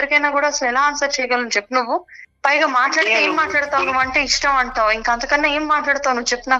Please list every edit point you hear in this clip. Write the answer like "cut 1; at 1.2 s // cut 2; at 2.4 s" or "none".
none